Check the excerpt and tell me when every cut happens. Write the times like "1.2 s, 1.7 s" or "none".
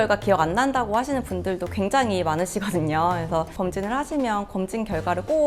3.5 s